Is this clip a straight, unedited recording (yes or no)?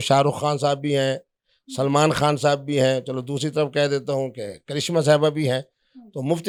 yes